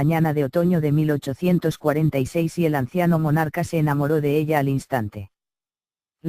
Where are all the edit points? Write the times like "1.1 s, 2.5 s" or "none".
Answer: 1.7 s